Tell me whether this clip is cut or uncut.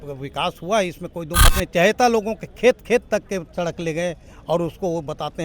cut